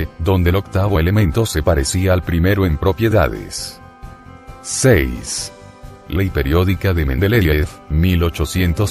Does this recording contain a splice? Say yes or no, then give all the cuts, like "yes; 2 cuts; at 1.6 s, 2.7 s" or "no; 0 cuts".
no; 0 cuts